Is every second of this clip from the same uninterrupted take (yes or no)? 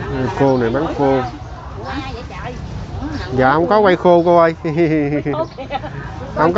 yes